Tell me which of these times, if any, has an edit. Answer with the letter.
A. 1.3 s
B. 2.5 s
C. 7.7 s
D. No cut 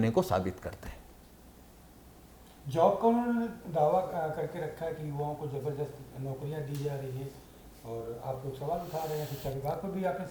D